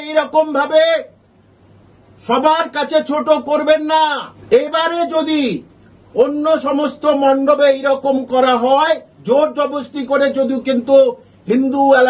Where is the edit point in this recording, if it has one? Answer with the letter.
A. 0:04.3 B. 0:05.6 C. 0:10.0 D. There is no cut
A